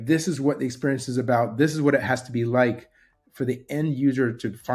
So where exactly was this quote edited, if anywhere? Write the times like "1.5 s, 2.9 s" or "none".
none